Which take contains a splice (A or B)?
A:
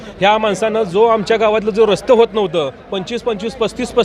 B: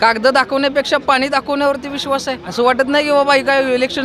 B